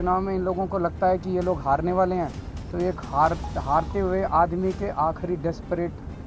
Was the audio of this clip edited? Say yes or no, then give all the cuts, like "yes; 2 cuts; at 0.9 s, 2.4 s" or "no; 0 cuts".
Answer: no; 0 cuts